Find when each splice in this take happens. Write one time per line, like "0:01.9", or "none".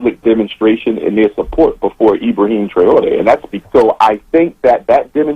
0:03.5